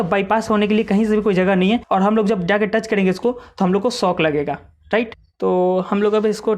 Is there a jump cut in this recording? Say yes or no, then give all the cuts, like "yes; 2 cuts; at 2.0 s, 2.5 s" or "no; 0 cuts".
yes; 2 cuts; at 1.8 s, 5.2 s